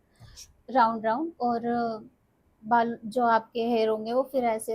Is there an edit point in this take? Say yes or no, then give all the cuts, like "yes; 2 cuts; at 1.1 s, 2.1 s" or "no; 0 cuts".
no; 0 cuts